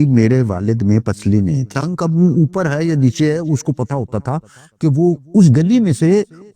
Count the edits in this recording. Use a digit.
1